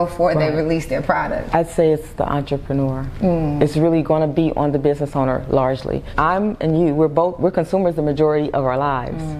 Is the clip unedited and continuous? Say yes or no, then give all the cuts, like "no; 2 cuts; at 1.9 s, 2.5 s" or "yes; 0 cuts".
no; 2 cuts; at 1.5 s, 6.1 s